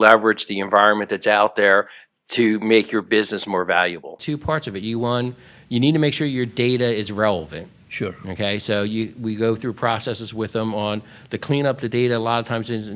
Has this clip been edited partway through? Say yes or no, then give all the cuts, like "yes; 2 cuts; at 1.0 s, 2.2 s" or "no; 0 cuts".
yes; 1 cut; at 4.3 s